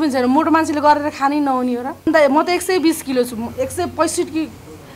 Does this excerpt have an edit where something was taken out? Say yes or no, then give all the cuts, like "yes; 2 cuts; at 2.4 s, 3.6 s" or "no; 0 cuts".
yes; 1 cut; at 2.1 s